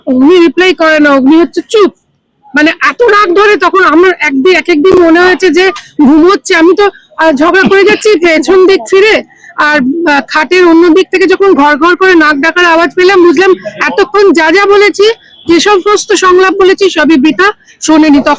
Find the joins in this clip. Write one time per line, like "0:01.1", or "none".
none